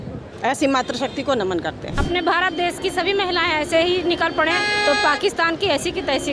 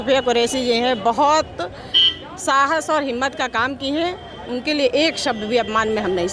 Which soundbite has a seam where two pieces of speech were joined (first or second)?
first